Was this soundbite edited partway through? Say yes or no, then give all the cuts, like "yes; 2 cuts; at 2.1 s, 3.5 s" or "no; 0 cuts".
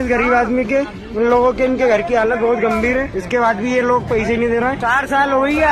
no; 0 cuts